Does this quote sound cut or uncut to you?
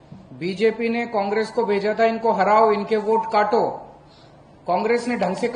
uncut